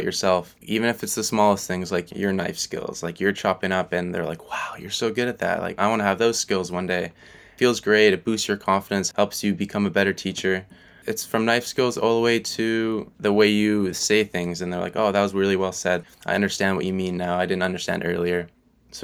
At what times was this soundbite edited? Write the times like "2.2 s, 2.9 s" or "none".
16.0 s